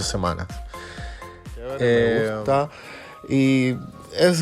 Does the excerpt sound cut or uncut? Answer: cut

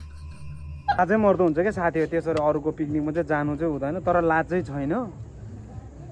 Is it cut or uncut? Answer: cut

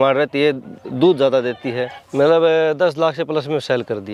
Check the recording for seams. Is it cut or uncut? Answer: cut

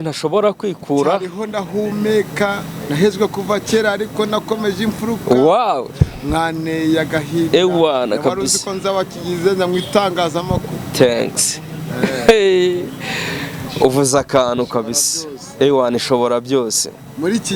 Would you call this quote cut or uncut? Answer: uncut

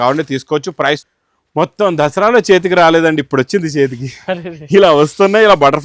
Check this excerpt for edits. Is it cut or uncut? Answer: cut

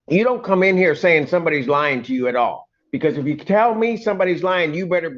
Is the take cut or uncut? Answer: uncut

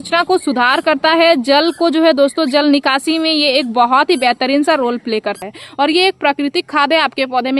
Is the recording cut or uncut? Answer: cut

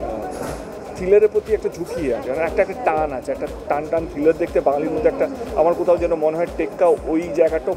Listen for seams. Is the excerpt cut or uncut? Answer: uncut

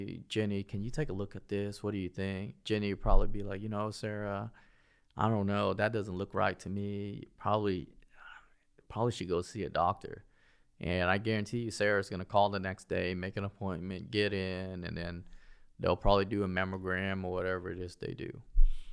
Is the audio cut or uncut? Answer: uncut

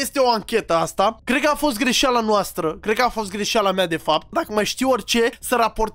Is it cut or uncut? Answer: cut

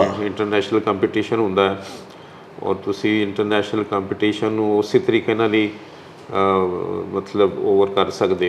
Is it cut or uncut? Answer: uncut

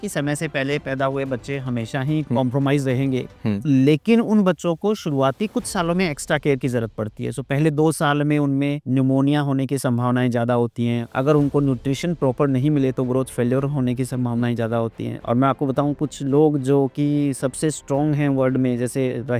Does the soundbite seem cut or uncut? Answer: uncut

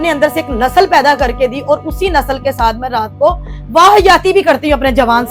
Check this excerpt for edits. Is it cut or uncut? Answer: uncut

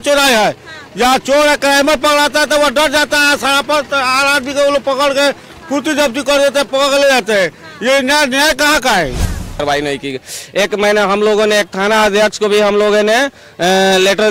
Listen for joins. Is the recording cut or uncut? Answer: cut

